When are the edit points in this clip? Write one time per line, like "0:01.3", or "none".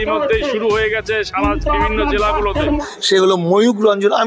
none